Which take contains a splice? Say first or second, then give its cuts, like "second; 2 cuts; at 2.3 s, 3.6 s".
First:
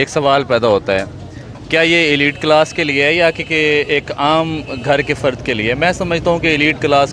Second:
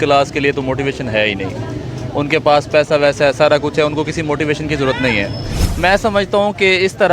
second; 1 cut; at 5.6 s